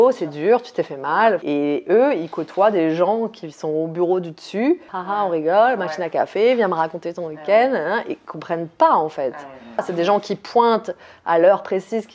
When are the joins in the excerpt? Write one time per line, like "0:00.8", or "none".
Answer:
0:01.4
0:04.9
0:10.0